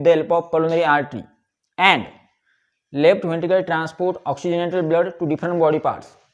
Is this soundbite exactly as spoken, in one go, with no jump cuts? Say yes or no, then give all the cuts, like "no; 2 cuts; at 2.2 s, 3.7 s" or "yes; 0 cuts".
yes; 0 cuts